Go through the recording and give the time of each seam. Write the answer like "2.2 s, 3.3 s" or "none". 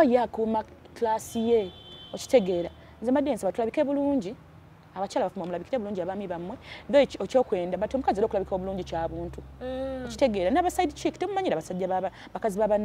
none